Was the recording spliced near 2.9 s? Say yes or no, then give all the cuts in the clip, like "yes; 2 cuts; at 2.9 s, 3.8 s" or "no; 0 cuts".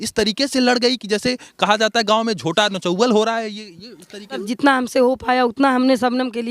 no; 1 cut; at 4.4 s